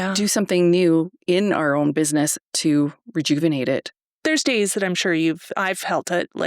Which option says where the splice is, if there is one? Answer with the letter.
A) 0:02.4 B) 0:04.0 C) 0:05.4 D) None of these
B